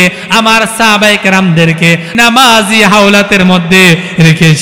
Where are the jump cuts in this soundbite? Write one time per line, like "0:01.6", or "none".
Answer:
0:02.1